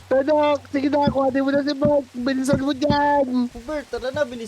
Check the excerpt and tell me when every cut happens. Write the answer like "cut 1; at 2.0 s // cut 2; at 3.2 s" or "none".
cut 1; at 3.5 s